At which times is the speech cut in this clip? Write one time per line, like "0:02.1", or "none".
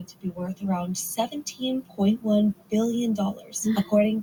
none